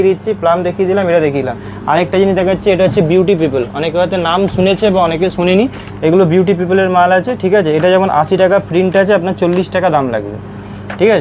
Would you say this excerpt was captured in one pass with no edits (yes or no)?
yes